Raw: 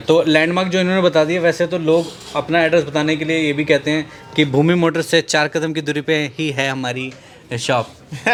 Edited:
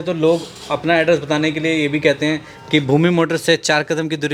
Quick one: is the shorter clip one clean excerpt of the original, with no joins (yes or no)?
yes